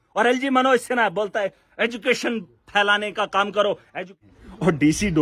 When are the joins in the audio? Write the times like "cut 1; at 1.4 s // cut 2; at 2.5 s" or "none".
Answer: cut 1; at 4.2 s